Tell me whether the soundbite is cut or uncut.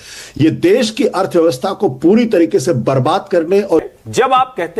cut